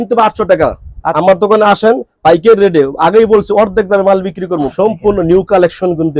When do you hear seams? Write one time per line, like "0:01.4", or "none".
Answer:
0:01.1
0:04.7